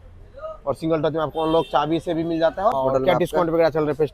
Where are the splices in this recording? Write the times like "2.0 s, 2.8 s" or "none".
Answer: 2.7 s